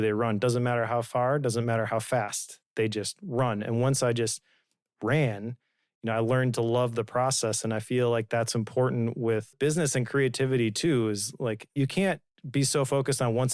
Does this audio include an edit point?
yes; 2 cuts; at 9.5 s, 11.8 s

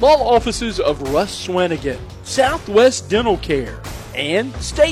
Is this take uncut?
yes; 0 cuts

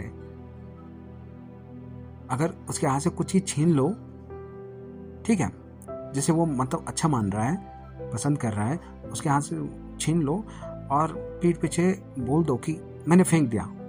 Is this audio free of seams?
yes; 0 cuts

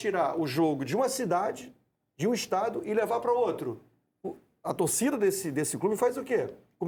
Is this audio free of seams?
yes; 0 cuts

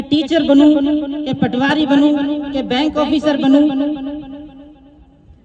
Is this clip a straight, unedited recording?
yes; 0 cuts

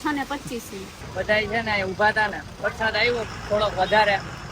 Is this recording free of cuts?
no; 1 cut; at 1.1 s

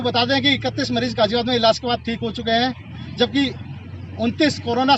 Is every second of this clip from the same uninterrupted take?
yes; 0 cuts

